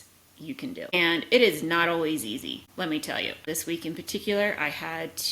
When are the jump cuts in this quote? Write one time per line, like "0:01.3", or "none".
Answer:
0:00.9
0:02.6
0:03.4